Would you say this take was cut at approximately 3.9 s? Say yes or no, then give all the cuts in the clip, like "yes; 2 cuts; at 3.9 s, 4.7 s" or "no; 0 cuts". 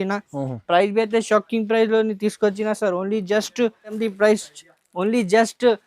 yes; 1 cut; at 3.9 s